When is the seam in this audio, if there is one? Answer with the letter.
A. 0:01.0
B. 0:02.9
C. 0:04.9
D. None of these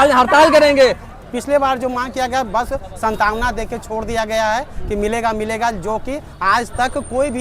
A